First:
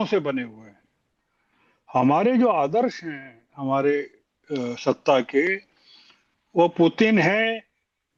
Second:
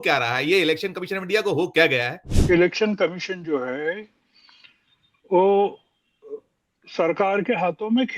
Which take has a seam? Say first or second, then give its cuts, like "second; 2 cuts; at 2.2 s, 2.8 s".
second; 1 cut; at 2.3 s